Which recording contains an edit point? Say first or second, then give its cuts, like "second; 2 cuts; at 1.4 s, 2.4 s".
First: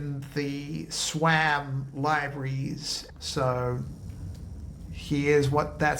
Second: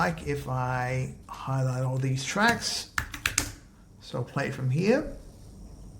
first; 1 cut; at 3.0 s